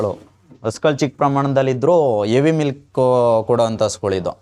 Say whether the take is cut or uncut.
uncut